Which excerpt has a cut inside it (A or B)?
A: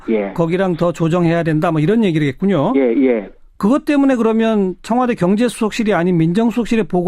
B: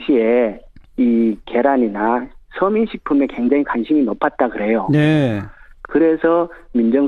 B